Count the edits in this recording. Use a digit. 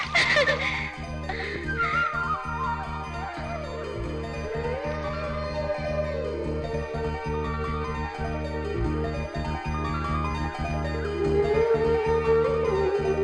0